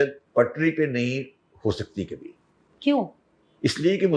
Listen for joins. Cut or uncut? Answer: uncut